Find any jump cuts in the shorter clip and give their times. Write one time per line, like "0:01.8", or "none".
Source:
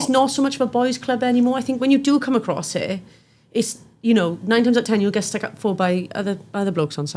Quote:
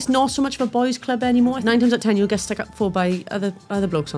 0:01.6